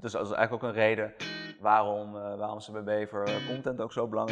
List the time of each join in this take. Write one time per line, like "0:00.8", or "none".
none